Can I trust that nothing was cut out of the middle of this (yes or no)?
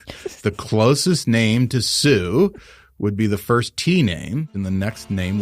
no